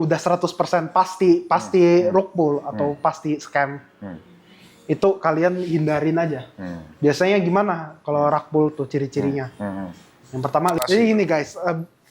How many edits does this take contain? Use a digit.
1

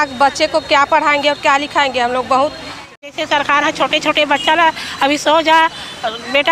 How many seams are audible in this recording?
1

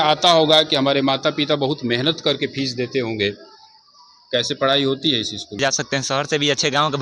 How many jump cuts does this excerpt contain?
1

